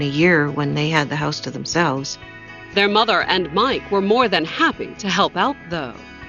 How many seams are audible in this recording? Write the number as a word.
zero